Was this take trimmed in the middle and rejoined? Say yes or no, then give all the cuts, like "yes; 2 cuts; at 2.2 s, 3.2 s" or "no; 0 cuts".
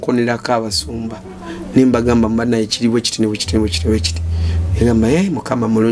no; 0 cuts